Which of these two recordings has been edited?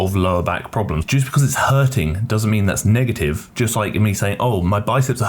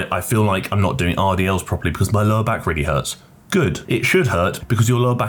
first; 1 cut; at 1.0 s

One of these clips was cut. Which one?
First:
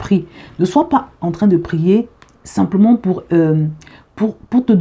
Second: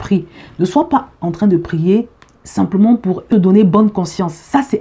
second; 1 cut; at 3.3 s

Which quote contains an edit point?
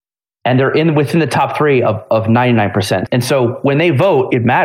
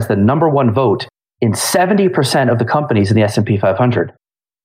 first; 1 cut; at 3.0 s

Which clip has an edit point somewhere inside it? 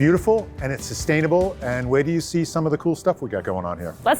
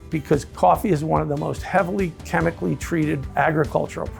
second; 1 cut; at 2.2 s

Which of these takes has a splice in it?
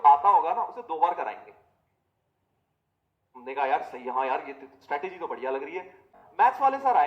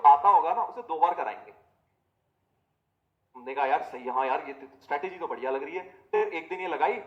first; 1 cut; at 6.1 s

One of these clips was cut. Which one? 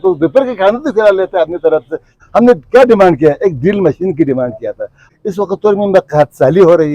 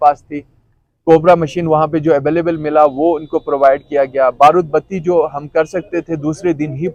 first; 2 cuts; at 2.2 s, 5.1 s

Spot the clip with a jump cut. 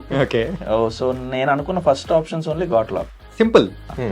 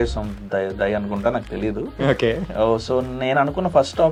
first; 1 cut; at 3.2 s

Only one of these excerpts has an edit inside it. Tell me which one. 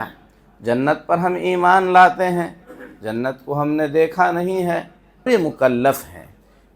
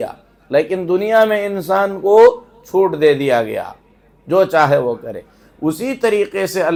first; 1 cut; at 5.3 s

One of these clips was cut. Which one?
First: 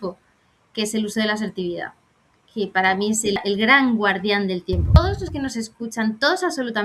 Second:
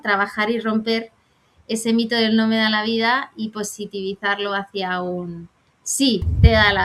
first; 2 cuts; at 3.4 s, 5.0 s

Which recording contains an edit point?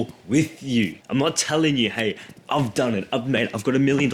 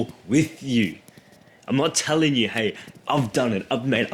first; 1 cut; at 1.0 s

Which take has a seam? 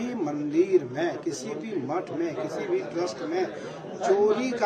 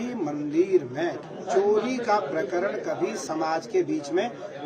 second; 2 cuts; at 1.3 s, 3.2 s

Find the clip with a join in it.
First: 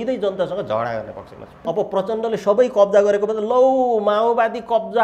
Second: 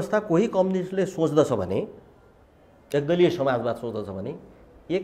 first; 1 cut; at 1.6 s

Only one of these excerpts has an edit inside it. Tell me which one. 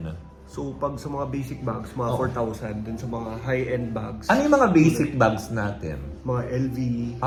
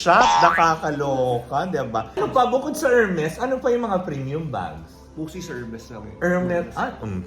second; 1 cut; at 2.2 s

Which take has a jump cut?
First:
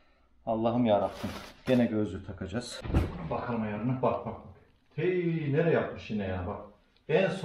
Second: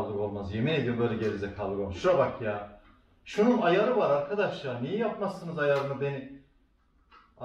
first; 1 cut; at 2.8 s

